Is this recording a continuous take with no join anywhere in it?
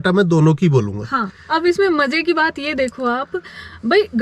no; 1 cut; at 1.3 s

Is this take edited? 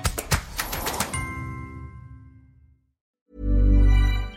yes; 1 cut; at 3.0 s

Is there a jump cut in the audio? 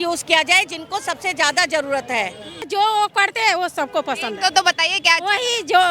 yes; 1 cut; at 2.6 s

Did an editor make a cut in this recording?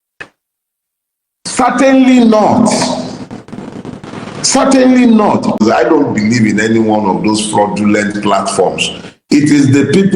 yes; 1 cut; at 5.6 s

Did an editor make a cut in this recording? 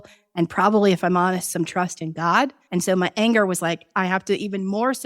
yes; 2 cuts; at 2.6 s, 3.9 s

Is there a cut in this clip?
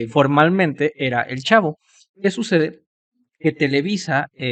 no; 0 cuts

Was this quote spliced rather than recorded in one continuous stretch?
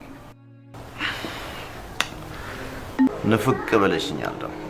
yes; 1 cut; at 3.1 s

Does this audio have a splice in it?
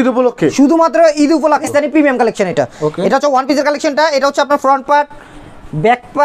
yes; 1 cut; at 1.7 s

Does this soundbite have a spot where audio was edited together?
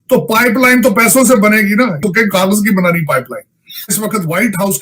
yes; 2 cuts; at 2.0 s, 3.9 s

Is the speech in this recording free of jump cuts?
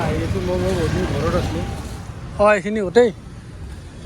no; 1 cut; at 1.7 s

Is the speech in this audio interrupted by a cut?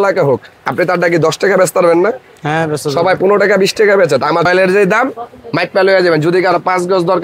yes; 1 cut; at 4.5 s

